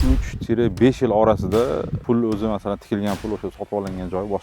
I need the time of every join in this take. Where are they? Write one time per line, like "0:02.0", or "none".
0:01.9